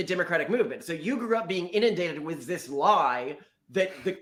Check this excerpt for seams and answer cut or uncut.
uncut